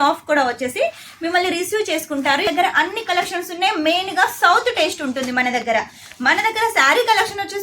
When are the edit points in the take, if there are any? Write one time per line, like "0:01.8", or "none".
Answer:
0:02.5